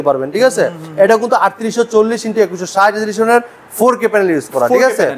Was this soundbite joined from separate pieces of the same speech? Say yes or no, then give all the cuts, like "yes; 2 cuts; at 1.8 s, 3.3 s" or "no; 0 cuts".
no; 0 cuts